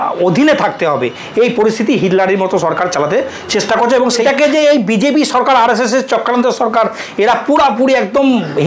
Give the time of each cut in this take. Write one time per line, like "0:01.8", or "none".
0:04.2